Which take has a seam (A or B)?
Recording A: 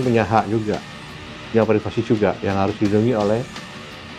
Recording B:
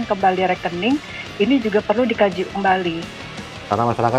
B